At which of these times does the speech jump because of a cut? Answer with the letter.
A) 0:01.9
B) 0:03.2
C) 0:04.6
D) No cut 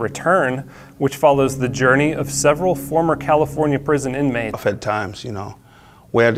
D